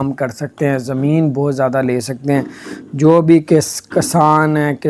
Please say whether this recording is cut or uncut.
uncut